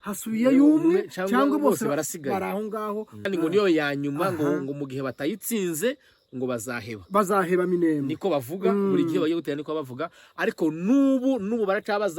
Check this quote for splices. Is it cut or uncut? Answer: cut